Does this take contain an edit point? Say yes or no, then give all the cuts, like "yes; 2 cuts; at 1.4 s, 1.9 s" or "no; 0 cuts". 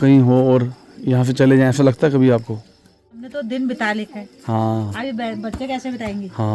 yes; 1 cut; at 3.3 s